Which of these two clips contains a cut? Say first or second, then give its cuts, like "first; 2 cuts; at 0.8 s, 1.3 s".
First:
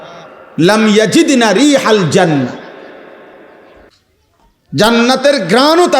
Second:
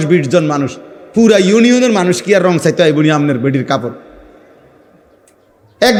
first; 1 cut; at 3.9 s